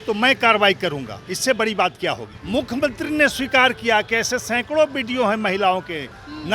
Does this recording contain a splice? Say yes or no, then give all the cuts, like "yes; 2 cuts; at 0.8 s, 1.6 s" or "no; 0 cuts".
yes; 1 cut; at 2.3 s